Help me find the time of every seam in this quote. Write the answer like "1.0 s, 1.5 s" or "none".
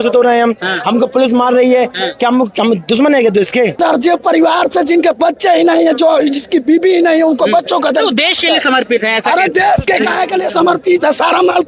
3.8 s